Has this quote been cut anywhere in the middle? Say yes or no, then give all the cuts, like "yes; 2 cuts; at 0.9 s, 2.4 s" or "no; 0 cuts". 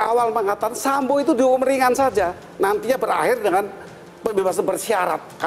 no; 0 cuts